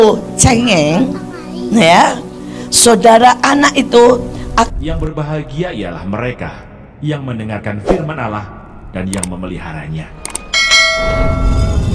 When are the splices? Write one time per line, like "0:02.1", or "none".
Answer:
0:04.7